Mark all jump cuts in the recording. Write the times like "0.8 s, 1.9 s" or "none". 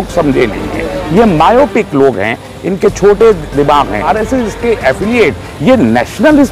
4.1 s